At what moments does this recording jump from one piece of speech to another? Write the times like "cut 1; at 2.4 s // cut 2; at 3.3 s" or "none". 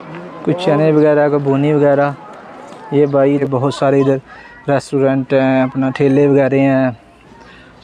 cut 1; at 3.4 s